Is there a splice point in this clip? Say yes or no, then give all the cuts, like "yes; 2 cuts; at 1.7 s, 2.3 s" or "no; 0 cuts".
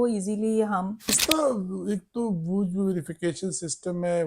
yes; 1 cut; at 1.2 s